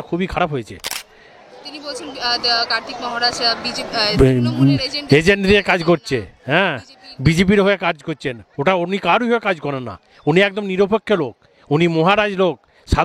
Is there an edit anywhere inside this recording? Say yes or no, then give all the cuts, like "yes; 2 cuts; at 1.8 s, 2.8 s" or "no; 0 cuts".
no; 0 cuts